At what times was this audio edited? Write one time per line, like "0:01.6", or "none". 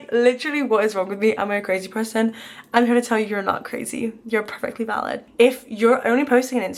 0:05.2